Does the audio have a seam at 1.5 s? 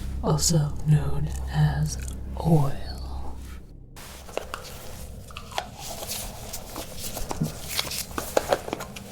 no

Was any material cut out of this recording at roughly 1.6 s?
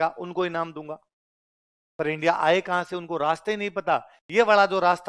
no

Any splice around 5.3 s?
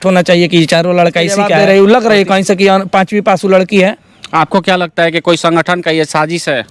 no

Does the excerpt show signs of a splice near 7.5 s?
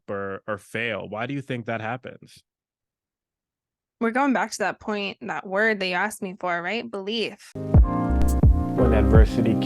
yes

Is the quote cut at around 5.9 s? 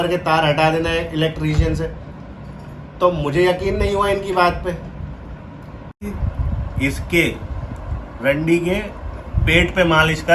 yes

